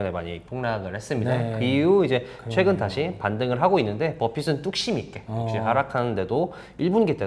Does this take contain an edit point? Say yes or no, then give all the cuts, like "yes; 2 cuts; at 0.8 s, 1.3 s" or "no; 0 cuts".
no; 0 cuts